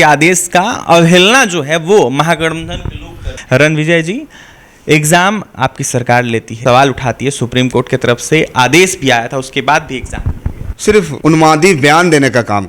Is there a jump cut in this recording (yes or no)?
yes